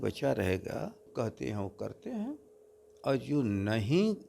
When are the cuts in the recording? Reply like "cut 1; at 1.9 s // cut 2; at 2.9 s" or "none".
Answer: cut 1; at 1.1 s